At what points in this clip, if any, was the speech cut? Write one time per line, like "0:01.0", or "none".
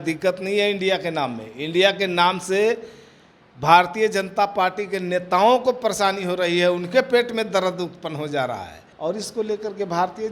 0:08.9